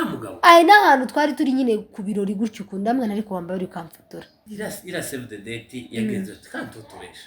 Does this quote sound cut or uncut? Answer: cut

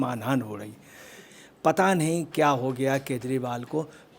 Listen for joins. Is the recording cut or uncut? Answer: cut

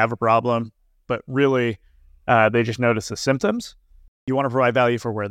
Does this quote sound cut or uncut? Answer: cut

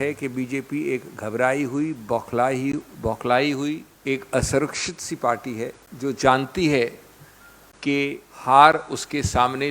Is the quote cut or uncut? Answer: cut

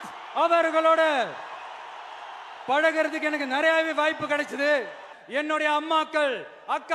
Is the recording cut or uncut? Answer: cut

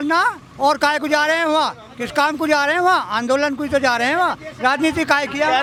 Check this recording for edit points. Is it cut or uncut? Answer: uncut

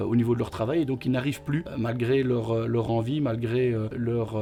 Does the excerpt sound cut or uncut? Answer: uncut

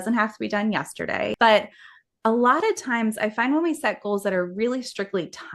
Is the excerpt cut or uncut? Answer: cut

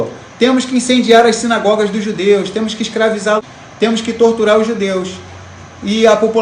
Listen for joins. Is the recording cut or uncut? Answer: cut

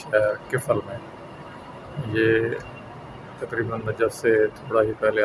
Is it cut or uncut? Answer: uncut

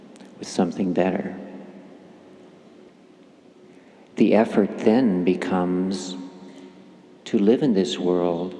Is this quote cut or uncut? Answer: cut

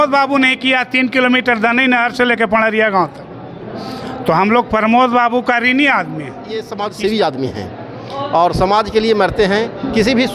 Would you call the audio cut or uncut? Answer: cut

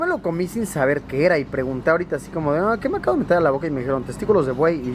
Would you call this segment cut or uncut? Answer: uncut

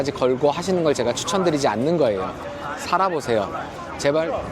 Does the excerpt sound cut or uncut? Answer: uncut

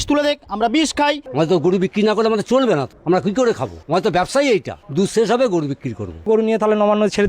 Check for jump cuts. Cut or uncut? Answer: cut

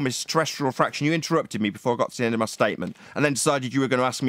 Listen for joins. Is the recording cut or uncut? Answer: uncut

